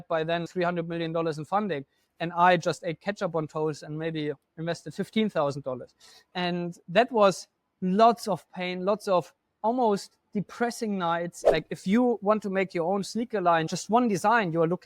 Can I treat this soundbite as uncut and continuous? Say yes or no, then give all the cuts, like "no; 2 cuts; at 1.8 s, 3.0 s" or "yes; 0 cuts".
no; 2 cuts; at 11.4 s, 13.7 s